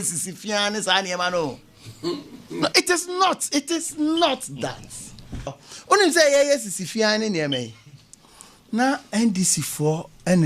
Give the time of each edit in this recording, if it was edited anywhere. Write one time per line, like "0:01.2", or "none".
0:05.7